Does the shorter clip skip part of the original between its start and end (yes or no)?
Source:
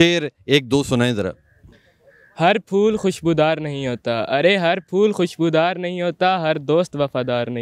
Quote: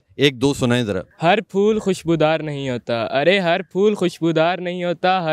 yes